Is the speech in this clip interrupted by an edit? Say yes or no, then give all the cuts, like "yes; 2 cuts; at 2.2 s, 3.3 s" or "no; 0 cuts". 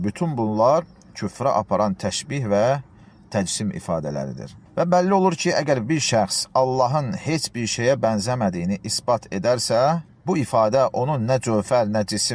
no; 0 cuts